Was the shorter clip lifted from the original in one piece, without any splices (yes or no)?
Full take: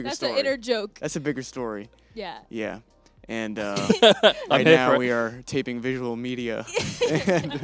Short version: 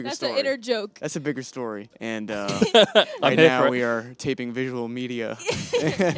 no